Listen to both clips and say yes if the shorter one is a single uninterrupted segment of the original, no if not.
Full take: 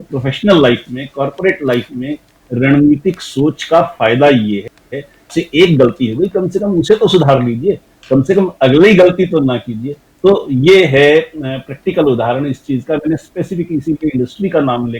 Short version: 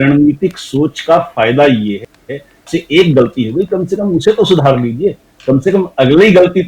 yes